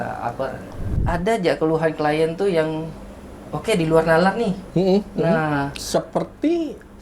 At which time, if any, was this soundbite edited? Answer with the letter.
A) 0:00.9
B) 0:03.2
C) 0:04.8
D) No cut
A